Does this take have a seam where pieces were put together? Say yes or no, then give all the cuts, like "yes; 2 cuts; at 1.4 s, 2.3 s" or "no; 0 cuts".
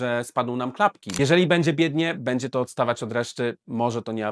yes; 1 cut; at 1.0 s